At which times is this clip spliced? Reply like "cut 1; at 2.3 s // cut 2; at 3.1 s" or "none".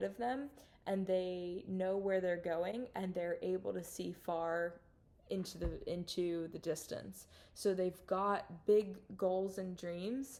none